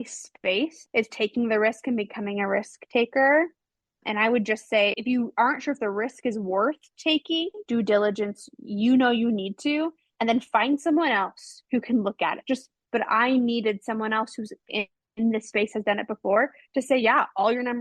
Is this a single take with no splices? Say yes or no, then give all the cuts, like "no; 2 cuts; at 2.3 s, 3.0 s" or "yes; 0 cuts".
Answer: no; 2 cuts; at 7.6 s, 12.7 s